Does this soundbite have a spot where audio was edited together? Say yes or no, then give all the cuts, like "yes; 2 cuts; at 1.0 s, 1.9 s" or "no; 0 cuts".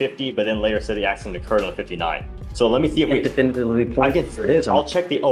no; 0 cuts